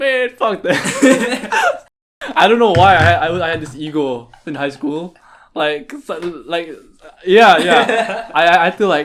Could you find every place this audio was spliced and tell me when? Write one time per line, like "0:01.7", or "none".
0:02.1